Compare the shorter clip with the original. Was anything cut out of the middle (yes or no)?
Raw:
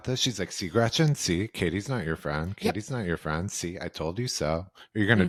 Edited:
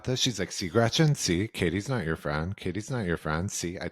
no